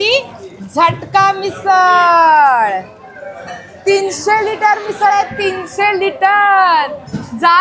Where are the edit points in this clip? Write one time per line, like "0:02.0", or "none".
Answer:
none